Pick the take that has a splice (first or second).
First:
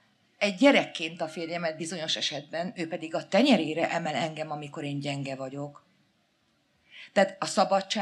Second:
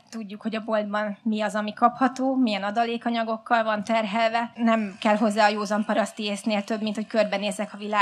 second